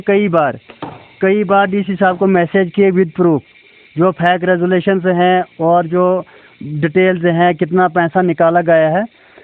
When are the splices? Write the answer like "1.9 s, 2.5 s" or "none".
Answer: none